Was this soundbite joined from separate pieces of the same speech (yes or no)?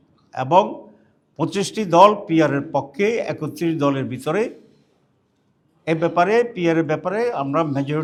no